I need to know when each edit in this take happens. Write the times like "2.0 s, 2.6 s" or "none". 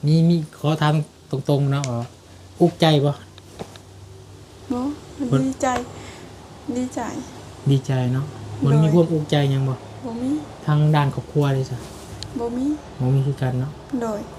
none